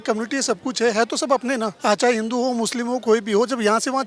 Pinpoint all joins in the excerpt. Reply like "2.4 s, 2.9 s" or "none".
1.7 s